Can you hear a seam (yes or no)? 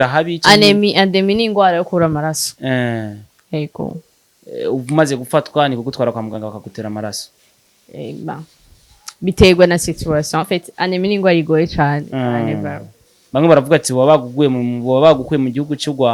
no